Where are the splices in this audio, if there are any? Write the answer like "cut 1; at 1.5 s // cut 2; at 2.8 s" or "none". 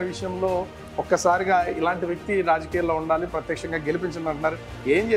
none